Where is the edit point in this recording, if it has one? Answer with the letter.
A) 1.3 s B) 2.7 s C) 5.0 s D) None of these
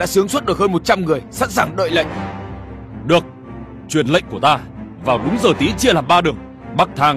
D